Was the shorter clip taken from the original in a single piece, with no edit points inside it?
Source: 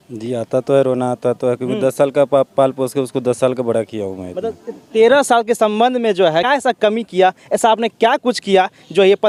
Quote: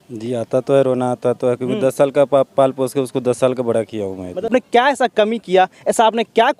no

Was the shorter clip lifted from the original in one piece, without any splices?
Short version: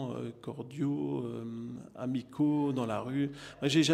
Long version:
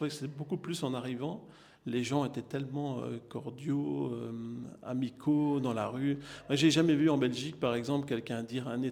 yes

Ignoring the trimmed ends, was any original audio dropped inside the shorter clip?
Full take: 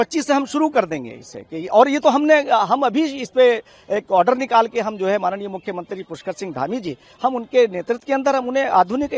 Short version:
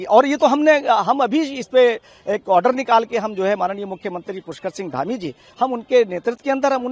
no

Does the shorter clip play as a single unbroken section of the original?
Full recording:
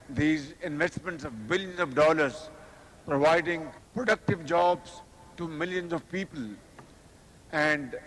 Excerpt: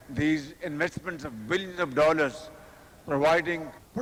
yes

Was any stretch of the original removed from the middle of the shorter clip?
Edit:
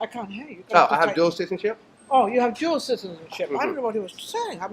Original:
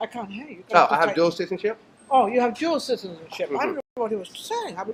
yes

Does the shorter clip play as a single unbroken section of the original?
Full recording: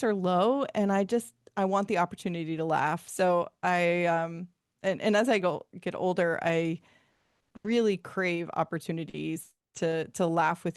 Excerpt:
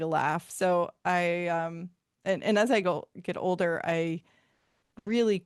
yes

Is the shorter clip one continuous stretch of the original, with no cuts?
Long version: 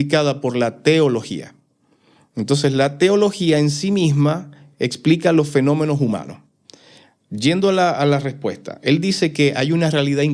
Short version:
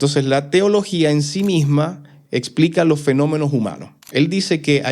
no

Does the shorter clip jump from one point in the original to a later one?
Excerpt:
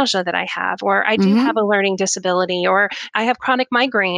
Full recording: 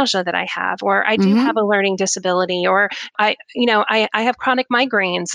yes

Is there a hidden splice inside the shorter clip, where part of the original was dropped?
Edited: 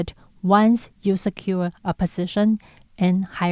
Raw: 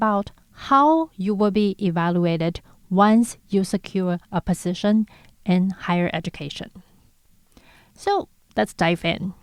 no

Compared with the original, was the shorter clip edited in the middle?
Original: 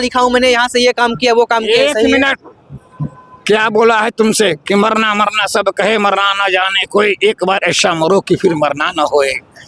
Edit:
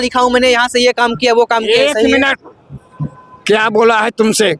no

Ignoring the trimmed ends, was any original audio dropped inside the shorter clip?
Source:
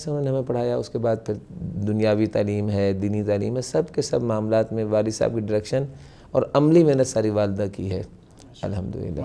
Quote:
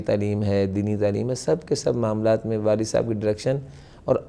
no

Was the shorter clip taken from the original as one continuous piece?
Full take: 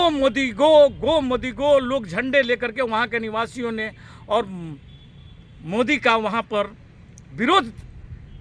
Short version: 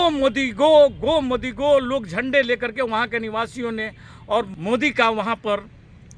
no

